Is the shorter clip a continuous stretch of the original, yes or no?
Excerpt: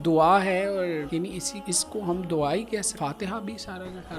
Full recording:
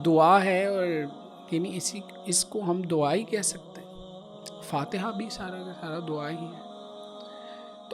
no